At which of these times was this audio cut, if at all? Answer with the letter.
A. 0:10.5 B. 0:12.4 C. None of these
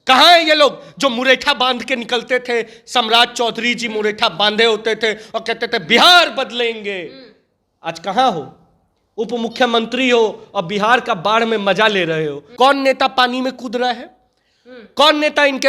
B